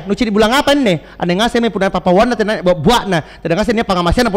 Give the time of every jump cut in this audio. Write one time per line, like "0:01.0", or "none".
none